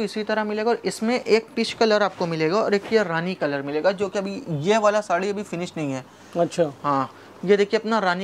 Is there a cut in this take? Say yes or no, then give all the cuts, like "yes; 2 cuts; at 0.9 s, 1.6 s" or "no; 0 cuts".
no; 0 cuts